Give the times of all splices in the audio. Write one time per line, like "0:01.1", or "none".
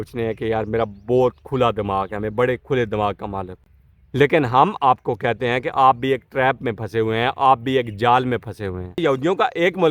0:09.0